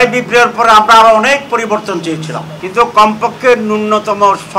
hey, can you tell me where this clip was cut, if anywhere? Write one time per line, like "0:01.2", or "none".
0:02.5